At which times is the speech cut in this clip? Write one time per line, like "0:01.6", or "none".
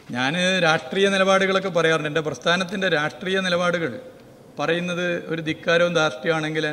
none